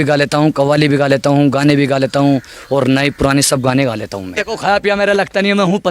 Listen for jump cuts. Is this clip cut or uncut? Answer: cut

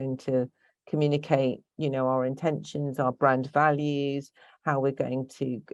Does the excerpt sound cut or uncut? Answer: uncut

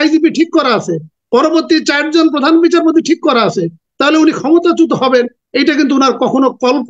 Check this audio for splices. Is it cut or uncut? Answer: uncut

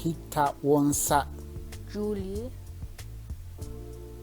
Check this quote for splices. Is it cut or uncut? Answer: cut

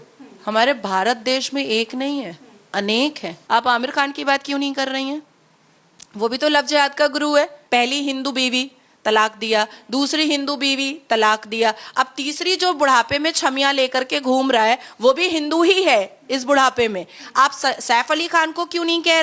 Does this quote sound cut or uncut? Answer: cut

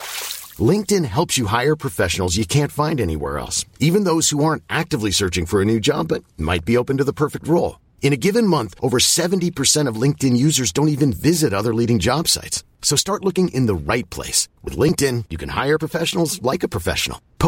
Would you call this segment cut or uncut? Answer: uncut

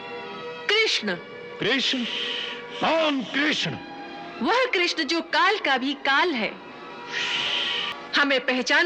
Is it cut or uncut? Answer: cut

